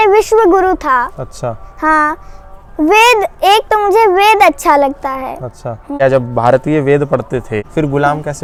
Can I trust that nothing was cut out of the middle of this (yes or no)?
yes